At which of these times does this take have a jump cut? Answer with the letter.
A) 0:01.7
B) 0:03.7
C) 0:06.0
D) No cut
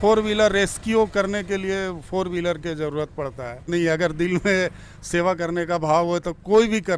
B